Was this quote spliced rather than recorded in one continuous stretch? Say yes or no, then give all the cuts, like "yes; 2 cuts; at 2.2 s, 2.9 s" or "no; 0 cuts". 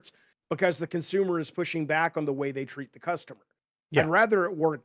no; 0 cuts